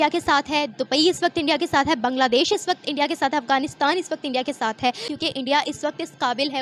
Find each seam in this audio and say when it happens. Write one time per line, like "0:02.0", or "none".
0:05.1

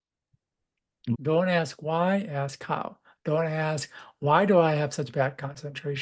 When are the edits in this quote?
0:01.0

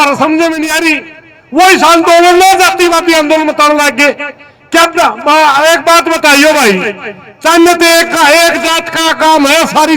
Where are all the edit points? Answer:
none

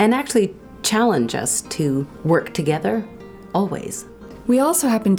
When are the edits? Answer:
0:02.1
0:04.3

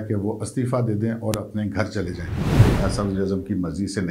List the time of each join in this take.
0:02.6

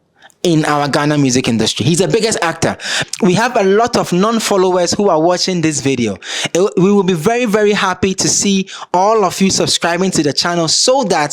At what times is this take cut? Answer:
0:02.9

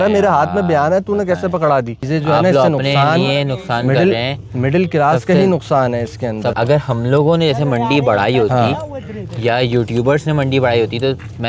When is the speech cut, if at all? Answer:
0:02.0
0:06.5

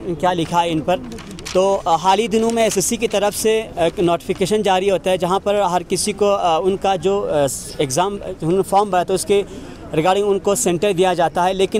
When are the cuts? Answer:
none

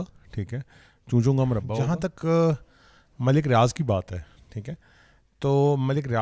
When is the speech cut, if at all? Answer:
0:01.7

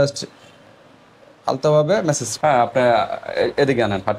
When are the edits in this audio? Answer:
0:02.3

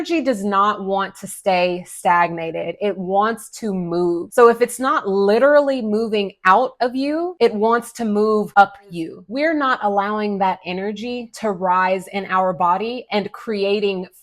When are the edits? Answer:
0:09.2

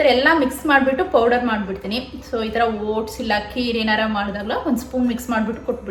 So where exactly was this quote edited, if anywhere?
none

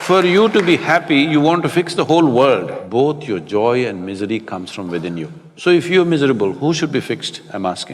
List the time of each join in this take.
0:02.8
0:05.4

